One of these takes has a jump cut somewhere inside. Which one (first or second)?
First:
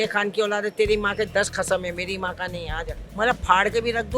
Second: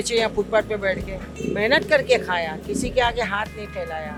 first